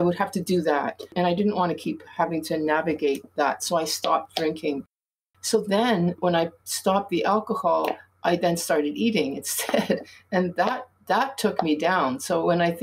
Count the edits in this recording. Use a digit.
2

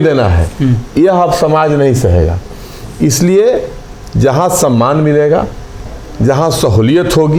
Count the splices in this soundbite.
0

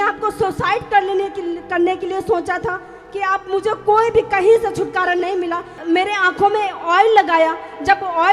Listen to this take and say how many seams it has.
1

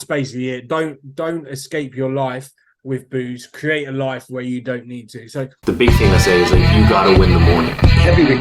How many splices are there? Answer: 1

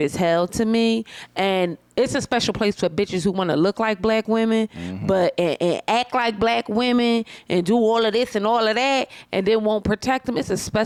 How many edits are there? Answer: 0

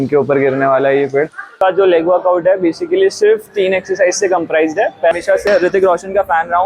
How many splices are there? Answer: 2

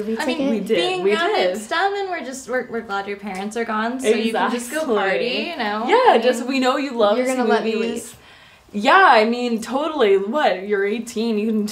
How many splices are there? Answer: 0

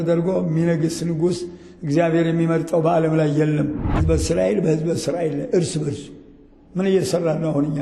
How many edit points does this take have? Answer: 1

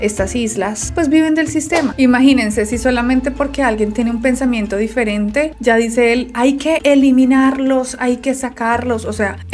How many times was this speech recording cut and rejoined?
1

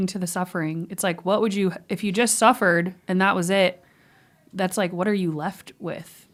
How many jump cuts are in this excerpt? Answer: 0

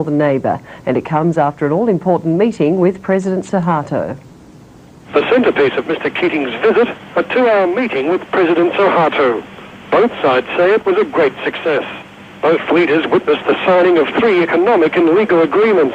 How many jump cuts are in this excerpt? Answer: 1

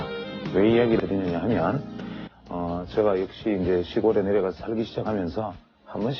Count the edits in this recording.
1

